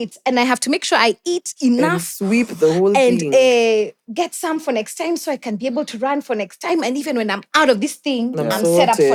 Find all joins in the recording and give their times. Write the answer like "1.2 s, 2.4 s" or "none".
none

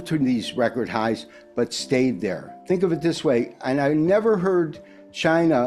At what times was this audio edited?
2.5 s

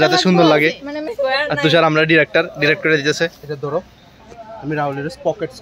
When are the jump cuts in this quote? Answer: 1.0 s

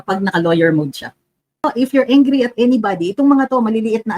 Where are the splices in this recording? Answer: 1.7 s

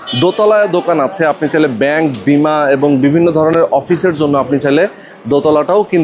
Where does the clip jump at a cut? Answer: none

